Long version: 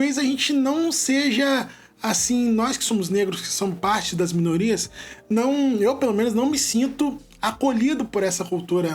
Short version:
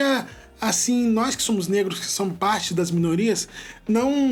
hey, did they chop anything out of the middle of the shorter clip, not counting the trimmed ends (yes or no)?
no